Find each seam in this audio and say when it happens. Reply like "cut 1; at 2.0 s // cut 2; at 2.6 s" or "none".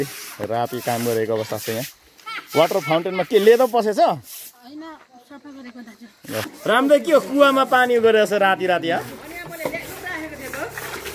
cut 1; at 6.5 s

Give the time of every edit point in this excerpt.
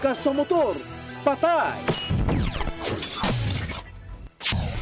cut 1; at 1.8 s // cut 2; at 2.6 s

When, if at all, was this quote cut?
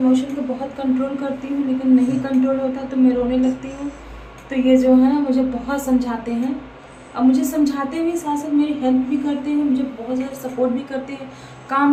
none

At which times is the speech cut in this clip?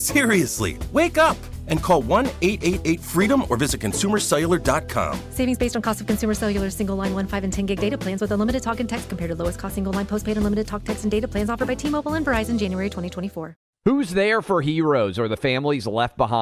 cut 1; at 13.5 s

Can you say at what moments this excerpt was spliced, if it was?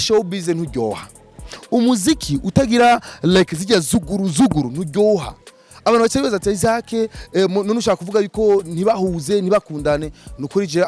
none

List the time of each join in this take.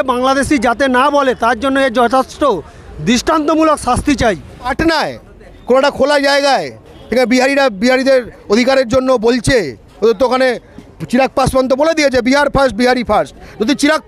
cut 1; at 4.7 s

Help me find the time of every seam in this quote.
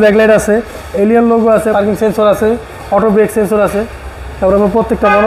cut 1; at 1.7 s

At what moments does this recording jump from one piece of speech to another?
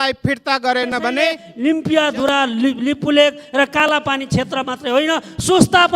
cut 1; at 1.5 s

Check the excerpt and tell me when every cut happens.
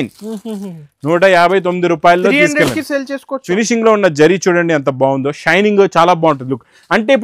cut 1; at 3.4 s

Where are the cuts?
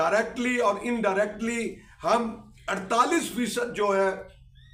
none

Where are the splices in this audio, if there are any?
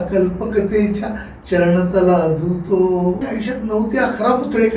cut 1; at 3.2 s

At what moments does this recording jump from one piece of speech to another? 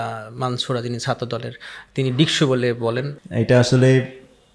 cut 1; at 3.2 s

